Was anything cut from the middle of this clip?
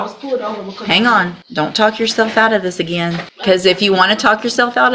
yes; 2 cuts; at 1.4 s, 3.3 s

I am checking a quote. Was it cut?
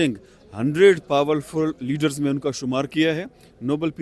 no; 0 cuts

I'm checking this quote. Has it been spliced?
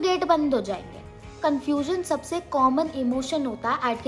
yes; 1 cut; at 1.4 s

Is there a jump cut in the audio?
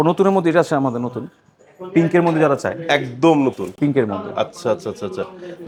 no; 0 cuts

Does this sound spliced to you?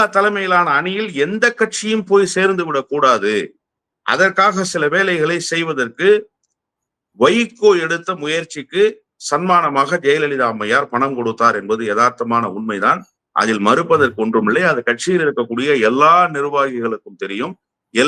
no; 0 cuts

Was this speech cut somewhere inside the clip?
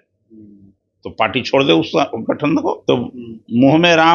yes; 1 cut; at 2.8 s

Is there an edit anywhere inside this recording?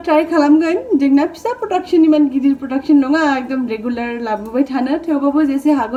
no; 0 cuts

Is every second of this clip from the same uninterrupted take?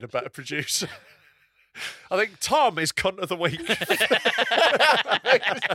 yes; 0 cuts

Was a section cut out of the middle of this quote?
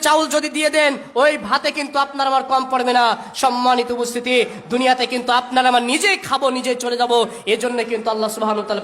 no; 0 cuts

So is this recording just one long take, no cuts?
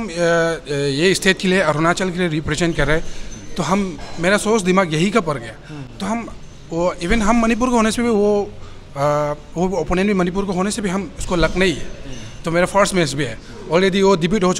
yes; 0 cuts

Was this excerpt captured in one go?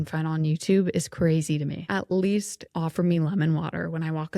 no; 2 cuts; at 1.8 s, 2.6 s

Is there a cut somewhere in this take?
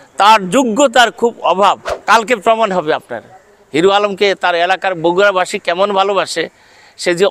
yes; 1 cut; at 1.9 s

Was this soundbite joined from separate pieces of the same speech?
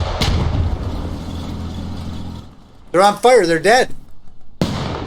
no; 0 cuts

